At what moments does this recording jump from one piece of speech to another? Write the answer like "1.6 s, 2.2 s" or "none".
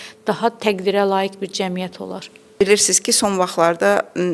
2.5 s